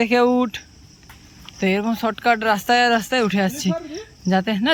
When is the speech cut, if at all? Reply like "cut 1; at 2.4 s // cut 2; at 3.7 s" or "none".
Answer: none

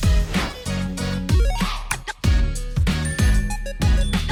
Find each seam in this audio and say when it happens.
none

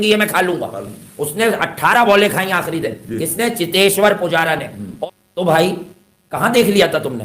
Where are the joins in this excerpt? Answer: cut 1; at 5.0 s

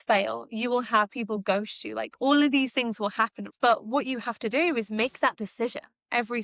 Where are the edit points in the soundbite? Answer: cut 1; at 3.4 s

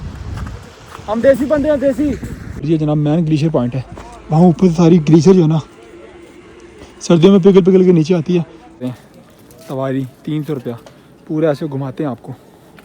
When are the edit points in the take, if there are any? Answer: cut 1; at 2.5 s // cut 2; at 8.8 s

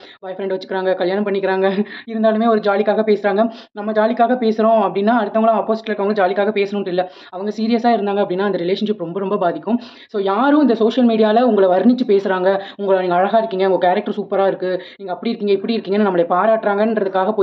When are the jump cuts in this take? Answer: none

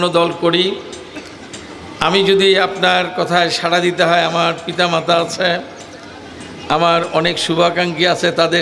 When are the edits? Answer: none

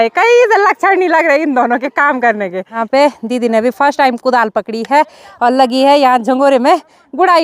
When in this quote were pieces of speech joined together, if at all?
cut 1; at 2.8 s

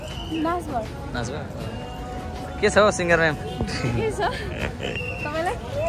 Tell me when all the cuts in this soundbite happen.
none

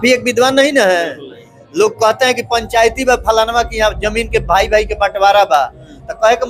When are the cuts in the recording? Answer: none

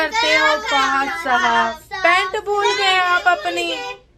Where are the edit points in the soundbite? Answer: none

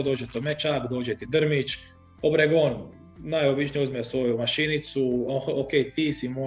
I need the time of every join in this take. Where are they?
none

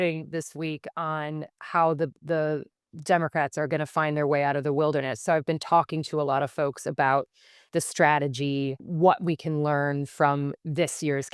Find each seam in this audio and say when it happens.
cut 1; at 8.8 s

